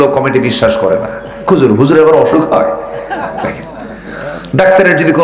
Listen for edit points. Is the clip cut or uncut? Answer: uncut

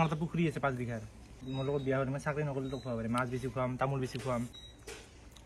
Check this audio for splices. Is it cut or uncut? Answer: cut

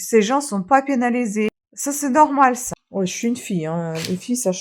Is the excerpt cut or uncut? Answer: cut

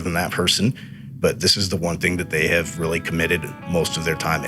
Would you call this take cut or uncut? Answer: uncut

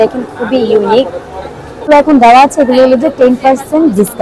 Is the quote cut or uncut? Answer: cut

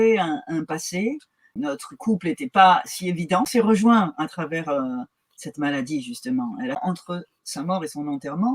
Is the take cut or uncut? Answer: cut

